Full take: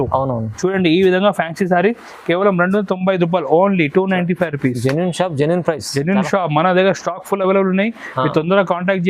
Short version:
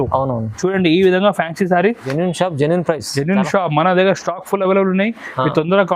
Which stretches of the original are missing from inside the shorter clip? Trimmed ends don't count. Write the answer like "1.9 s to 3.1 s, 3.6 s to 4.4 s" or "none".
2.1 s to 4.9 s